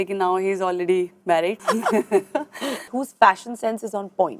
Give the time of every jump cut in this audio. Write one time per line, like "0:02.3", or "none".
0:01.6
0:03.0